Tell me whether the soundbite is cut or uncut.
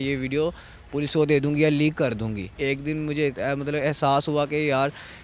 cut